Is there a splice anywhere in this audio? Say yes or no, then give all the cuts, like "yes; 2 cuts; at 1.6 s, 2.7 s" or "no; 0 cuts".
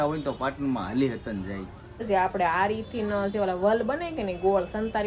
yes; 1 cut; at 2.0 s